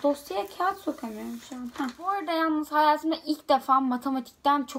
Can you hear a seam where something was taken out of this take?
yes; 1 cut; at 2.2 s

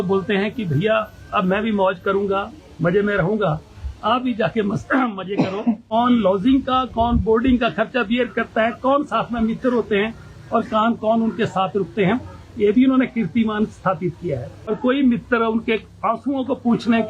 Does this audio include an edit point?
yes; 2 cuts; at 5.8 s, 14.7 s

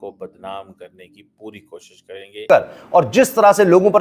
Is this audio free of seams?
no; 1 cut; at 2.5 s

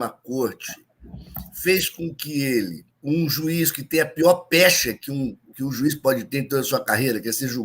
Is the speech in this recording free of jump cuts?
no; 1 cut; at 2.9 s

